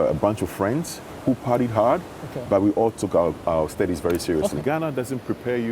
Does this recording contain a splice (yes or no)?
yes